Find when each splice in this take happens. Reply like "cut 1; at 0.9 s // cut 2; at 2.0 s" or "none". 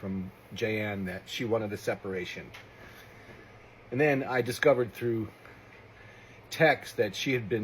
cut 1; at 4.1 s